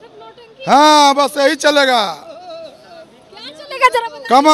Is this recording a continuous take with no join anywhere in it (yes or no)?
yes